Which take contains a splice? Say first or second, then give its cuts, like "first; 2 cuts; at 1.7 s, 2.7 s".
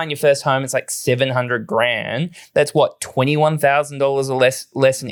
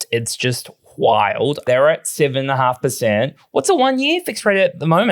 second; 1 cut; at 1.7 s